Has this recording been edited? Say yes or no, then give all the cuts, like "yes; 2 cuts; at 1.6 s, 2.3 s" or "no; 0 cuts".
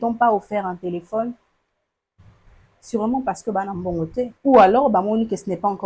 yes; 1 cut; at 4.3 s